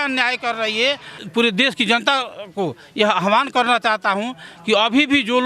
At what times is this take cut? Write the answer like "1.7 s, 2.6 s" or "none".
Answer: 1.1 s